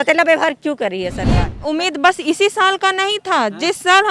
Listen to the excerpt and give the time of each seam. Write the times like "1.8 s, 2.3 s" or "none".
1.5 s